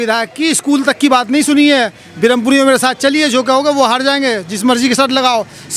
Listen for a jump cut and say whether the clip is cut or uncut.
uncut